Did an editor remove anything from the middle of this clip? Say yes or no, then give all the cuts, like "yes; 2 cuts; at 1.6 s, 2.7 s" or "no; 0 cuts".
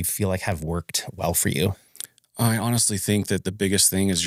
no; 0 cuts